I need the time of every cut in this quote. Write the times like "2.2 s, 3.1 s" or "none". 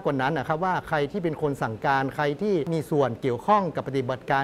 2.7 s